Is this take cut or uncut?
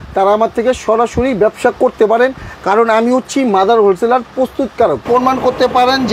cut